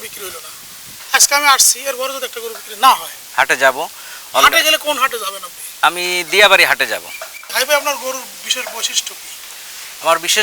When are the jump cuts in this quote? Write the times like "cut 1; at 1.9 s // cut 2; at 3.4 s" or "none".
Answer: cut 1; at 3.2 s // cut 2; at 7.4 s

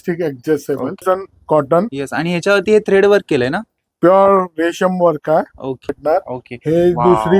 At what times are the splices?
cut 1; at 1.0 s // cut 2; at 6.0 s

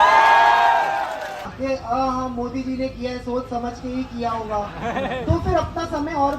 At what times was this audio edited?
cut 1; at 1.5 s

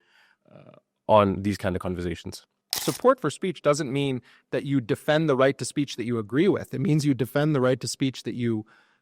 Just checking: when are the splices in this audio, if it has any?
cut 1; at 2.8 s

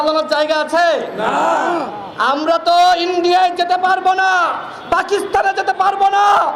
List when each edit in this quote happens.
none

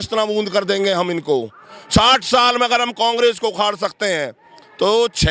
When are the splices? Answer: none

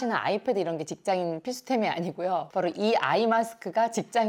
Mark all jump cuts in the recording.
none

